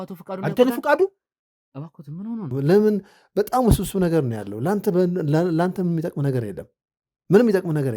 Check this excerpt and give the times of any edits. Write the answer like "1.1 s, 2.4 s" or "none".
2.5 s